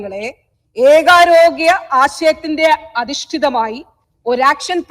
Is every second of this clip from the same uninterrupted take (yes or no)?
yes